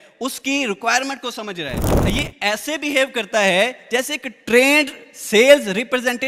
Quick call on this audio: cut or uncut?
cut